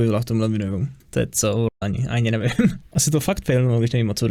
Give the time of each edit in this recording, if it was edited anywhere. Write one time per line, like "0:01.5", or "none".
none